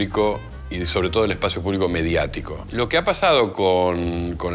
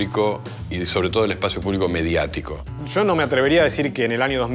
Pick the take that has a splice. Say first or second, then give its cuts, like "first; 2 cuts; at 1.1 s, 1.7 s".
second; 1 cut; at 2.7 s